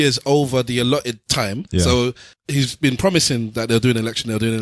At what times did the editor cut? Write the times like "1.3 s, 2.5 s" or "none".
1.6 s, 2.3 s